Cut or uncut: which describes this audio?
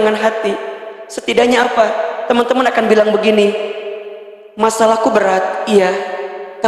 uncut